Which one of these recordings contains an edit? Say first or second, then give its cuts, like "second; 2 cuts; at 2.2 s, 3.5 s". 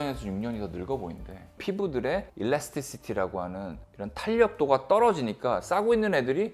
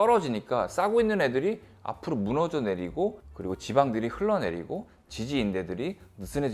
first; 1 cut; at 1.6 s